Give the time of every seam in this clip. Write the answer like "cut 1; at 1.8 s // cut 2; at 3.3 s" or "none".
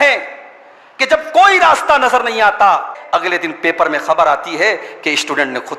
cut 1; at 3.0 s